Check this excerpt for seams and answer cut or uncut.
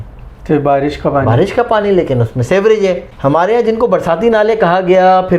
cut